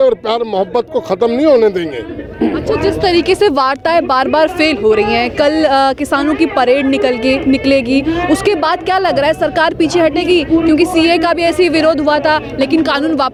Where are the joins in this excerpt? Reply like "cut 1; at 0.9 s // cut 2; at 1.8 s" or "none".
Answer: none

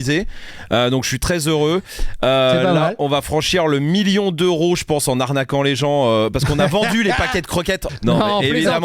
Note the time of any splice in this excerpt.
cut 1; at 7.8 s

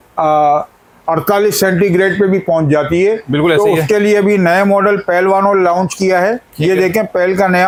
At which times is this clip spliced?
none

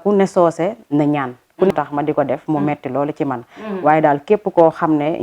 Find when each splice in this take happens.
cut 1; at 1.7 s

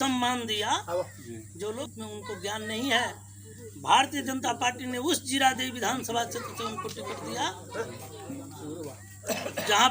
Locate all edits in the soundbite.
cut 1; at 1.8 s

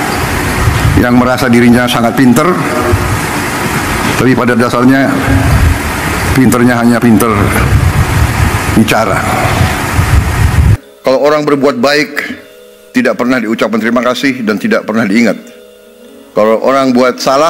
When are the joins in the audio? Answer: cut 1; at 10.8 s

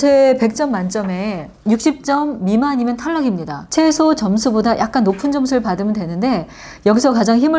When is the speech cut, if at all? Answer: none

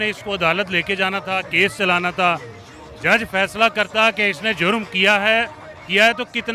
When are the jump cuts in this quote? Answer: none

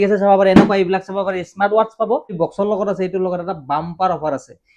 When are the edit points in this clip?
cut 1; at 2.3 s

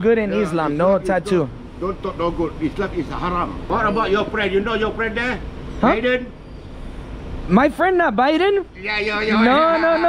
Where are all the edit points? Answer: cut 1; at 3.6 s

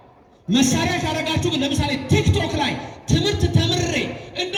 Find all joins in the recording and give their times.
none

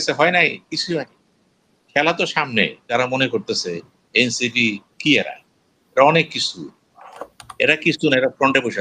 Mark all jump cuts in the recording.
cut 1; at 2.9 s

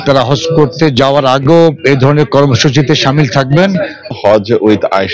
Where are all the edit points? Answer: cut 1; at 4.1 s

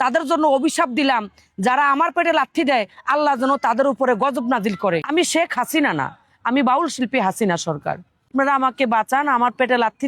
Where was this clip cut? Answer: cut 1; at 5.0 s // cut 2; at 8.3 s

